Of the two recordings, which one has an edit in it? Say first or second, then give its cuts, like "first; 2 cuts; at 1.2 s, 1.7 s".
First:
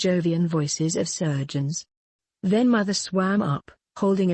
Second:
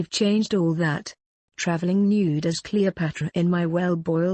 first; 1 cut; at 1.8 s